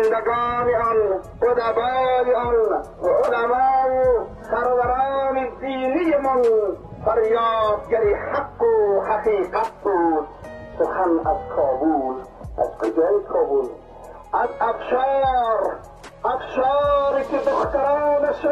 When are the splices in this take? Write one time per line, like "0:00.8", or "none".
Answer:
0:01.3
0:02.9
0:04.4
0:06.9